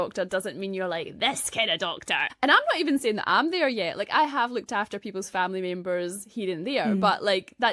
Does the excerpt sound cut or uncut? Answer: uncut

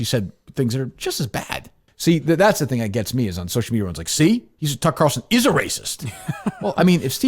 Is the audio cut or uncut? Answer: cut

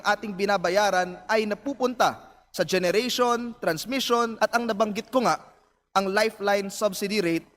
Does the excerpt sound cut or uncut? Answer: cut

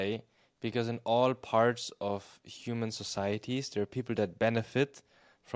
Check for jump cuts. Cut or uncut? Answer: uncut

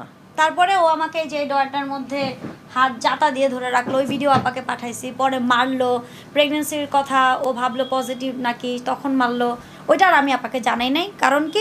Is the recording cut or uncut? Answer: uncut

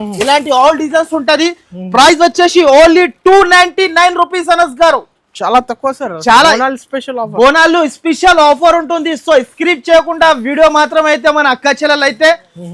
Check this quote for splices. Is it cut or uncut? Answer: uncut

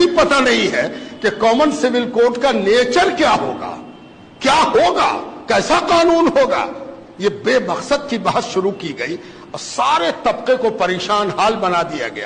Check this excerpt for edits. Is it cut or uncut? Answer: uncut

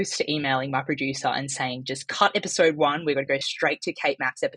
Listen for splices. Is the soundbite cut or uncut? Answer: uncut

